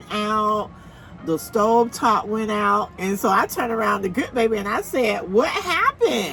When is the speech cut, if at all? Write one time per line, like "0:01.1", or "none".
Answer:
none